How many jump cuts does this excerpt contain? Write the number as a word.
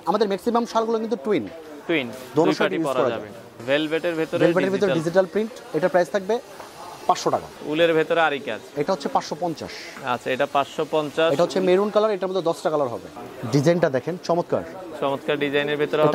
three